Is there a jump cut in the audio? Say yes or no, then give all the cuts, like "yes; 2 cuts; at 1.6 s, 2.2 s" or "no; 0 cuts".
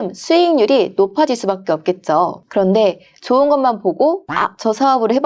yes; 1 cut; at 2.4 s